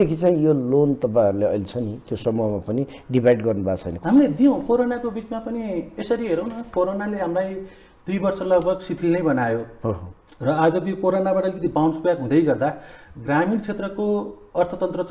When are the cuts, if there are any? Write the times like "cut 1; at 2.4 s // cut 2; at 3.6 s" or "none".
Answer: cut 1; at 3.9 s